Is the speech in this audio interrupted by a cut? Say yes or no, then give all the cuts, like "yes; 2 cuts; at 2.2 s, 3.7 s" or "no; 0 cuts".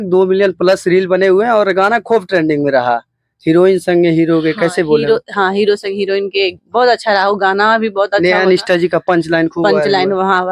no; 0 cuts